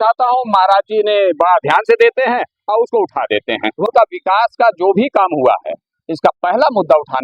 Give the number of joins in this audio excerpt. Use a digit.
1